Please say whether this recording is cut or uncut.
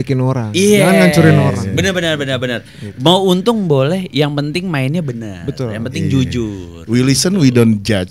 uncut